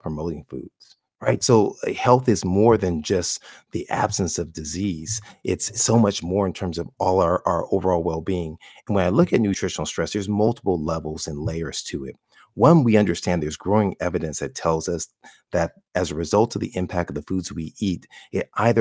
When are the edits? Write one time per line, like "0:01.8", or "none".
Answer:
0:01.4
0:09.6